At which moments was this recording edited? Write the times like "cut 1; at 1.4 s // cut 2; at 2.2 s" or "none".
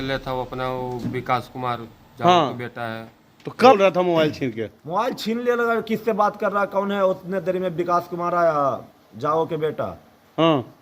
cut 1; at 3.8 s